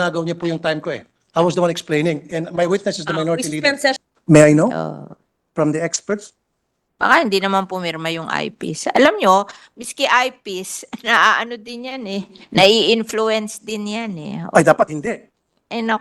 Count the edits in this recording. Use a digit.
1